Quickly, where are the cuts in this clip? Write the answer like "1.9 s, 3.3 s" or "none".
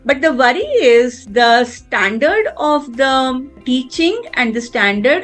3.6 s